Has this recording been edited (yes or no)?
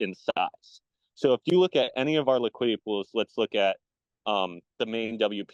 no